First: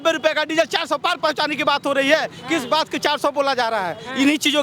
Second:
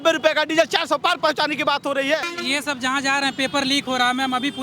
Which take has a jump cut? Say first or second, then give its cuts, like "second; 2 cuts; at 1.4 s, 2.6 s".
second; 1 cut; at 2.3 s